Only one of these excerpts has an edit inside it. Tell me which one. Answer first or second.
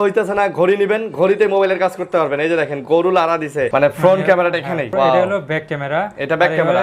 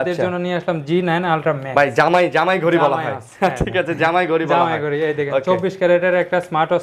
first